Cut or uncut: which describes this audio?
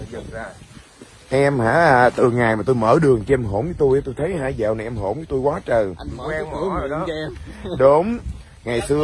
uncut